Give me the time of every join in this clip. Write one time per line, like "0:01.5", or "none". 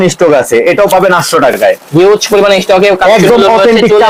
none